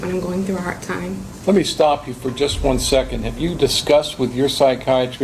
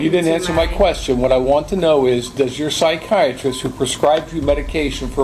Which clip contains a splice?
first; 1 cut; at 1.3 s

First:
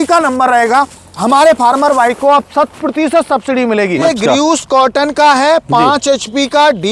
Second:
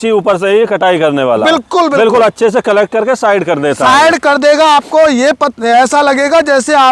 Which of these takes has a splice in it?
first; 1 cut; at 4.0 s

